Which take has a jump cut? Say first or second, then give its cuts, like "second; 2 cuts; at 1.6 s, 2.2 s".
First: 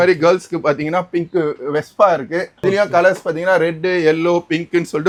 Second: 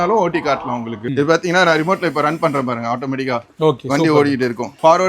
second; 1 cut; at 1.1 s